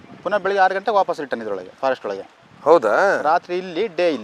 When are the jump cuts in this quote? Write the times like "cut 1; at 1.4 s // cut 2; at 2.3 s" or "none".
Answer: none